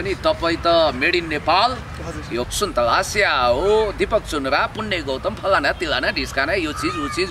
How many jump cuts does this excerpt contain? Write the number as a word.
one